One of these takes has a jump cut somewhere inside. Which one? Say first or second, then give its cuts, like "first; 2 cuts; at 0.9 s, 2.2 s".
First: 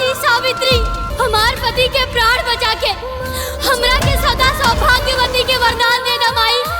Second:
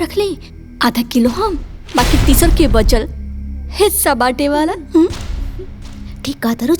first; 1 cut; at 1.0 s